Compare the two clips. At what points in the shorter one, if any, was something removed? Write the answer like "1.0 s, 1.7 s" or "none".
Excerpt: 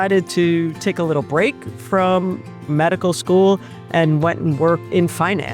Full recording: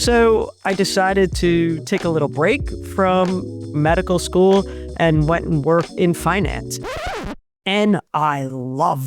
none